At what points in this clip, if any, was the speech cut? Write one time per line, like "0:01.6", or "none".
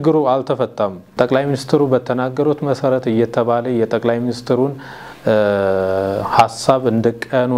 0:01.1